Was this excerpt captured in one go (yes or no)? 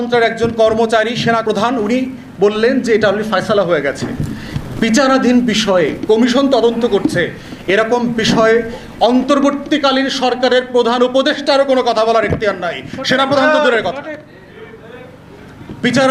no